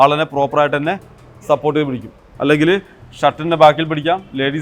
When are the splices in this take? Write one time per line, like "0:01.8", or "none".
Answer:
0:02.3